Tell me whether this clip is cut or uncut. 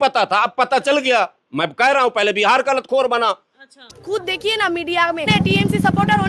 cut